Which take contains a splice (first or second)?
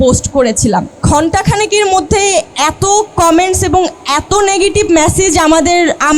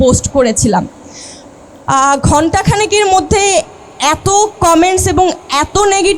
first